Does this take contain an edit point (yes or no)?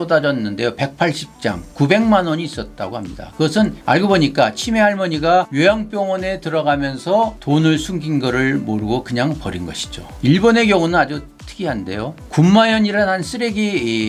no